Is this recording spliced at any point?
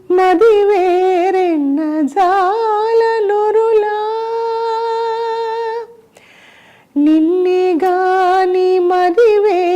no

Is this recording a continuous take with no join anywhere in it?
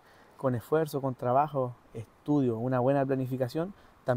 yes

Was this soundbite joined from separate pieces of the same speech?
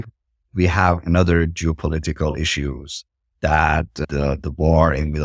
yes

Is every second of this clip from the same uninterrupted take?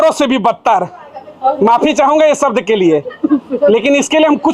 yes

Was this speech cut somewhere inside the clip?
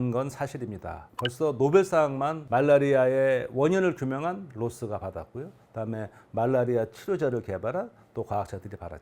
no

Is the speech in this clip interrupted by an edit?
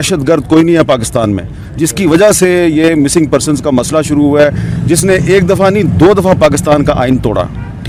no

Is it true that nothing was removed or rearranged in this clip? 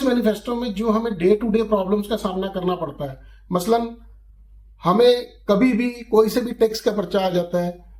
yes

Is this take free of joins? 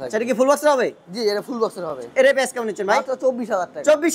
yes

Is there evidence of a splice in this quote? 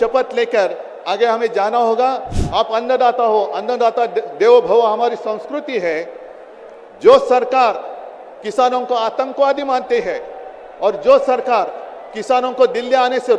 yes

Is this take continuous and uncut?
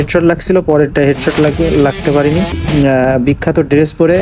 no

